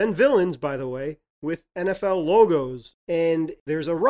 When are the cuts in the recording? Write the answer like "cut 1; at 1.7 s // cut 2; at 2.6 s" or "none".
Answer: cut 1; at 3.1 s